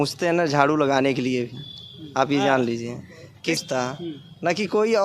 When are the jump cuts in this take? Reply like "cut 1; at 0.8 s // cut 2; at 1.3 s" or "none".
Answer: cut 1; at 3.6 s